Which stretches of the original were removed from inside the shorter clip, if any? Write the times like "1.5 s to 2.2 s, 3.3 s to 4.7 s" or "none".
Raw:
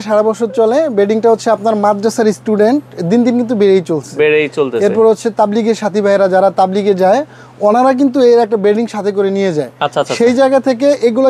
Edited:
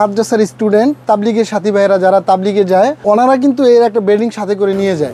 2.9 s to 5.3 s, 7.3 s to 7.5 s